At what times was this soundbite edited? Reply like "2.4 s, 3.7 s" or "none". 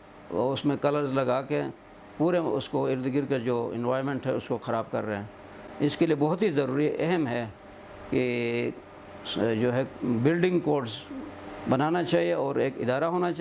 none